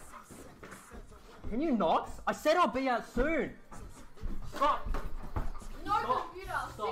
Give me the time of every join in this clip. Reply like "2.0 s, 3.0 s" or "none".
3.5 s, 5.5 s